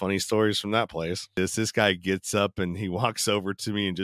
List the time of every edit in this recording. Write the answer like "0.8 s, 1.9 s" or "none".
1.4 s